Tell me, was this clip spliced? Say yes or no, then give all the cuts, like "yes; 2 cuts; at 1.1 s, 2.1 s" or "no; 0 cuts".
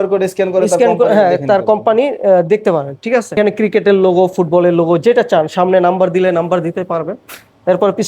yes; 1 cut; at 3.4 s